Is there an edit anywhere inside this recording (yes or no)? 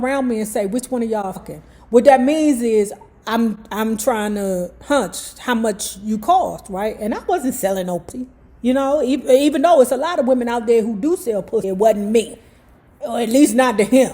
yes